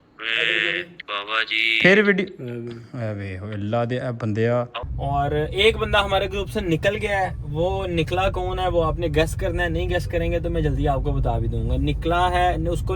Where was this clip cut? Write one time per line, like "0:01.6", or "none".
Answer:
0:04.8